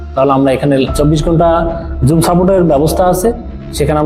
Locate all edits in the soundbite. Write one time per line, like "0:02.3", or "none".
0:00.9

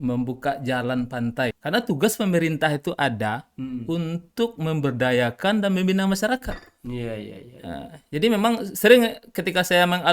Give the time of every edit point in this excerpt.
0:01.6

